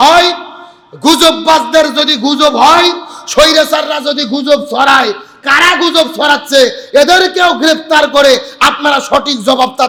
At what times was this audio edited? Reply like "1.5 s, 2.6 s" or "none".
none